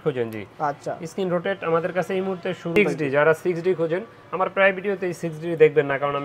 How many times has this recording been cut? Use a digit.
1